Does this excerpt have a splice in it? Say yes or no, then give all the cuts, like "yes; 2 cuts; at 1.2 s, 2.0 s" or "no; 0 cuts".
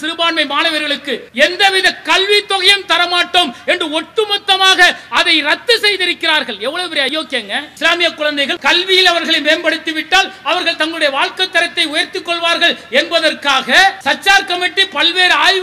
yes; 4 cuts; at 1.3 s, 7.1 s, 8.5 s, 14.0 s